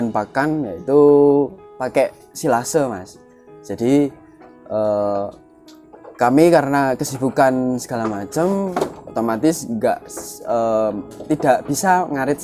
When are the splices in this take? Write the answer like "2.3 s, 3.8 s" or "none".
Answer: 1.8 s